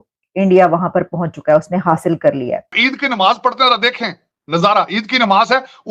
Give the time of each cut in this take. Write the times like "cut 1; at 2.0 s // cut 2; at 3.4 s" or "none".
cut 1; at 2.7 s